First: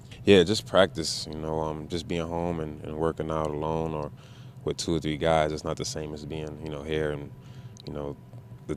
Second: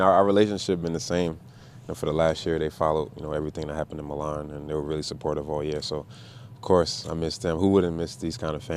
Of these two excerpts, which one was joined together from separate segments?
second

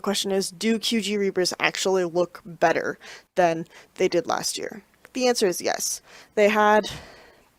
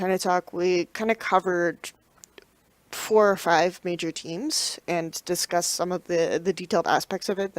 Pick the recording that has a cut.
second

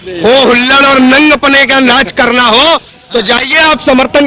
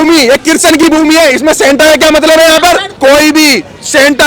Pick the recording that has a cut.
second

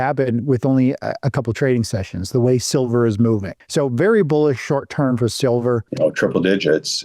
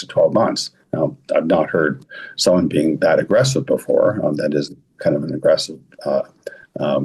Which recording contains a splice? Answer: first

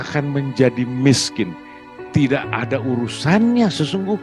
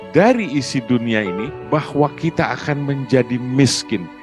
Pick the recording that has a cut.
second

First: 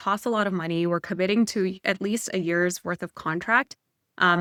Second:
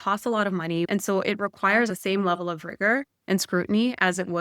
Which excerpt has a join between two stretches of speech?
second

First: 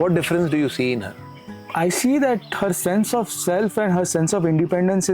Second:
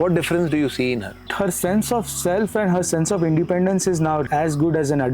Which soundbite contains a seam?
second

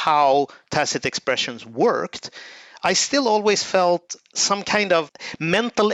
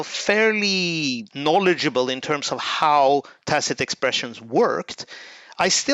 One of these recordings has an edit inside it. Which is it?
second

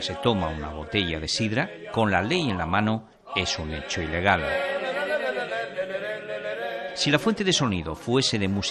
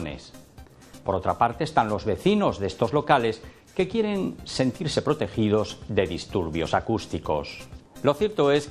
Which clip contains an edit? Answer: first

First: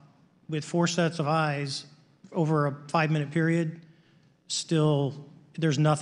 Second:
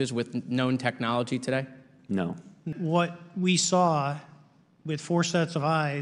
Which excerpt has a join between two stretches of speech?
second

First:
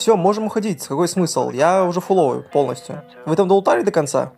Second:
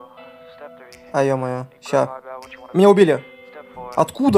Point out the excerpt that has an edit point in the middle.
second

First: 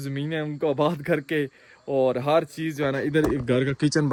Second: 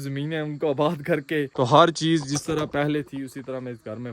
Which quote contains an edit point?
second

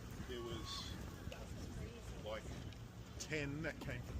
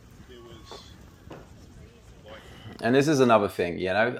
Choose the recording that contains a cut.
first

